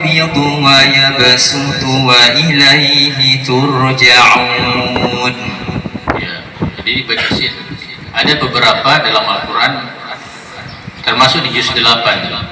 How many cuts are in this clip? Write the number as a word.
zero